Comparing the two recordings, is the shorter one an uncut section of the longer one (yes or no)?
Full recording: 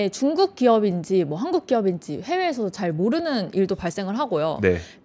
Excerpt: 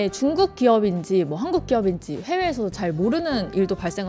yes